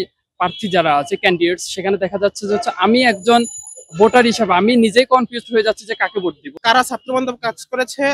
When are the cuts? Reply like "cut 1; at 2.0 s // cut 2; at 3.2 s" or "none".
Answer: cut 1; at 6.4 s